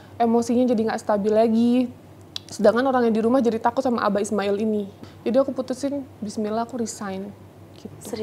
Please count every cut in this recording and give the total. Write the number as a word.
one